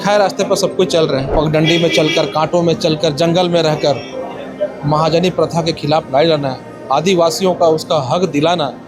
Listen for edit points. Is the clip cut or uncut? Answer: cut